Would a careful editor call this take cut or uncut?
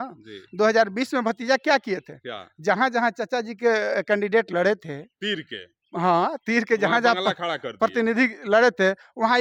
uncut